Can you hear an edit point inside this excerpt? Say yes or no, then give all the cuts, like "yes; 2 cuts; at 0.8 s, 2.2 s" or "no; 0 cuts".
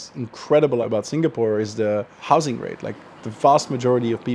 yes; 2 cuts; at 0.8 s, 2.2 s